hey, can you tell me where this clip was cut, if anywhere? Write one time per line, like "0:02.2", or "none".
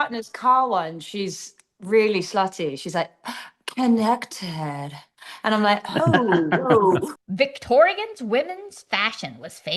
0:07.1